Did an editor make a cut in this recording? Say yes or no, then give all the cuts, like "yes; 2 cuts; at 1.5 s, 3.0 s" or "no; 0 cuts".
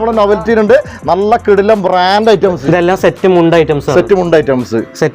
yes; 1 cut; at 2.6 s